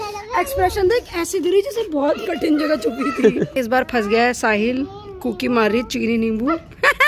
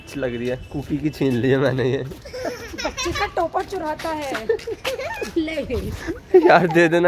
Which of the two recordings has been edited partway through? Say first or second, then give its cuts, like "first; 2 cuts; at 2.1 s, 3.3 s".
first; 1 cut; at 3.5 s